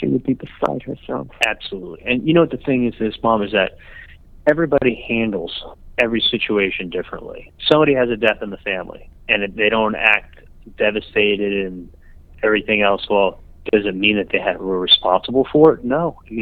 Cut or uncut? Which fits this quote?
uncut